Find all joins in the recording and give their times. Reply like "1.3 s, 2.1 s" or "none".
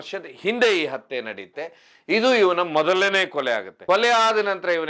none